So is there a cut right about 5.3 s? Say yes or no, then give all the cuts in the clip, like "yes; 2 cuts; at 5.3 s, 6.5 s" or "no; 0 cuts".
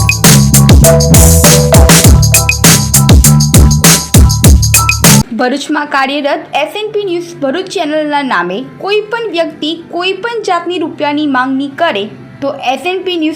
yes; 1 cut; at 5.3 s